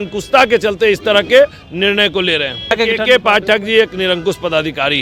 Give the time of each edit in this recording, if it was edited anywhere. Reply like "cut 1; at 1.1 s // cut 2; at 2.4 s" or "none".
cut 1; at 2.7 s